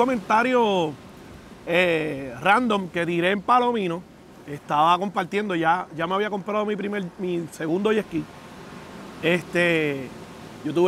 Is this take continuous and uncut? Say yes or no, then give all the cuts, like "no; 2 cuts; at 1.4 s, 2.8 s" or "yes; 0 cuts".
yes; 0 cuts